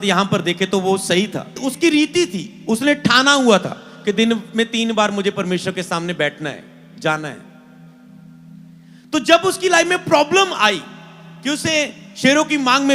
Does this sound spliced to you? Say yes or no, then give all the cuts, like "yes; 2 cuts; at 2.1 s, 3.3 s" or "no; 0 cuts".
yes; 1 cut; at 1.6 s